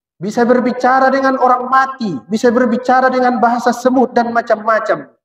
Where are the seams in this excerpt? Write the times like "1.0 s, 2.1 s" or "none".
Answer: none